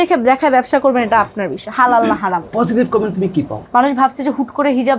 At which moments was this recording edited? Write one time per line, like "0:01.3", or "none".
0:02.4
0:03.6